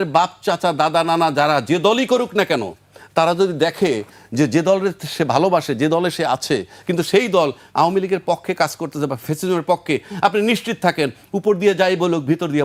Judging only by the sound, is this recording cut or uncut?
uncut